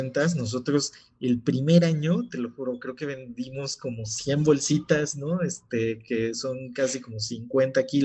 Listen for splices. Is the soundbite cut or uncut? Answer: uncut